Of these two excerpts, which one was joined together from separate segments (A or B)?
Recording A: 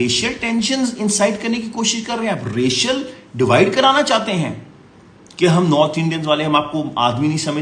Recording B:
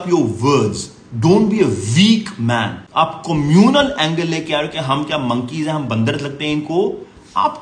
B